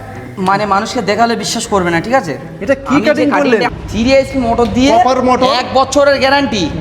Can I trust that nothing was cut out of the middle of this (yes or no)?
no